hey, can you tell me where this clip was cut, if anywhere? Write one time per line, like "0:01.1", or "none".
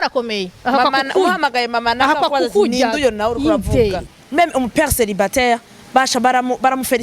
0:04.1